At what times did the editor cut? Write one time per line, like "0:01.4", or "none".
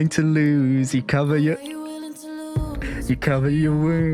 none